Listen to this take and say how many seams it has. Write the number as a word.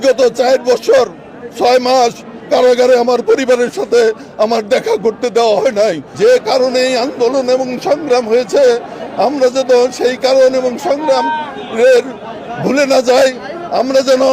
one